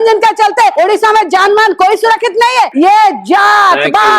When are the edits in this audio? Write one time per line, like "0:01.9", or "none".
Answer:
0:00.7
0:02.7